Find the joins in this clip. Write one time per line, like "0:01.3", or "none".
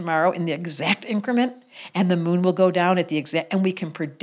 none